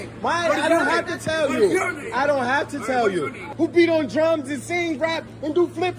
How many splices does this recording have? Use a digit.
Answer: 1